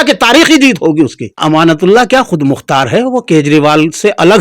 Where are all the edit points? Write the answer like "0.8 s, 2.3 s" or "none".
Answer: 1.4 s